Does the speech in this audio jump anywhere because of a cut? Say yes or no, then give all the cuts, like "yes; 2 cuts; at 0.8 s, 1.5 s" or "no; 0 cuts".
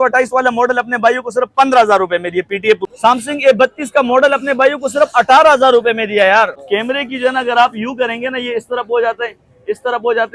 yes; 2 cuts; at 2.9 s, 6.6 s